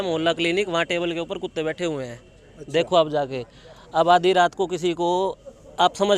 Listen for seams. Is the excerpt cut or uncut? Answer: uncut